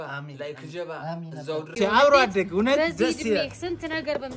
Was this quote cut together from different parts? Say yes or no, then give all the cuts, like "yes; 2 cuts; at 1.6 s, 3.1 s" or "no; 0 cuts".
yes; 1 cut; at 1.7 s